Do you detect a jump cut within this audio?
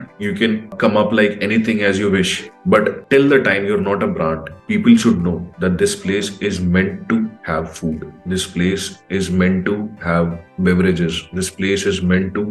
no; 0 cuts

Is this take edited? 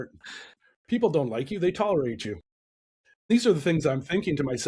yes; 1 cut; at 3.3 s

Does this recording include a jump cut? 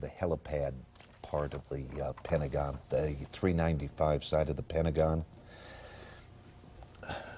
no; 0 cuts

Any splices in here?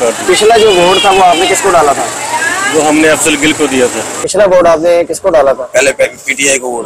yes; 1 cut; at 4.1 s

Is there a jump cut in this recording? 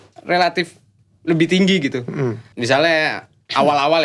yes; 1 cut; at 2.5 s

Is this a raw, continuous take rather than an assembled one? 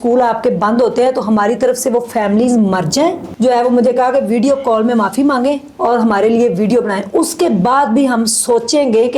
no; 1 cut; at 3.3 s

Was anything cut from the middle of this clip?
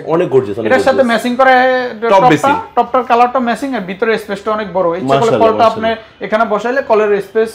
no; 0 cuts

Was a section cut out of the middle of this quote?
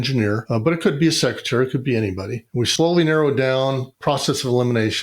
yes; 2 cuts; at 2.7 s, 4.0 s

